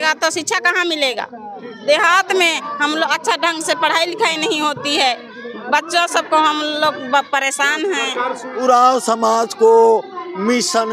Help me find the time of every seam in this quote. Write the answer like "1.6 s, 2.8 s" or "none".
1.6 s, 8.4 s